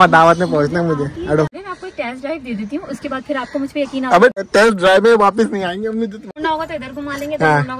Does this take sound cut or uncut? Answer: cut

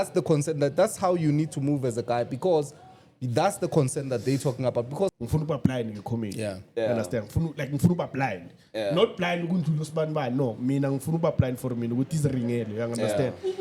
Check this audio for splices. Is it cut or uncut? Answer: cut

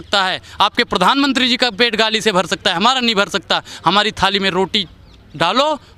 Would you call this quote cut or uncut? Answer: uncut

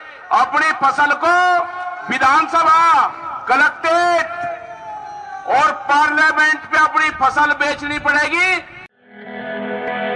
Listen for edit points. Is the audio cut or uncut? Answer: cut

